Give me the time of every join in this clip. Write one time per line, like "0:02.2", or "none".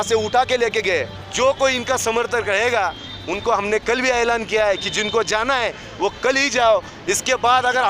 0:01.2